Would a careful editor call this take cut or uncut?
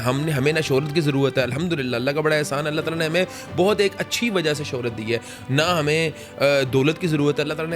uncut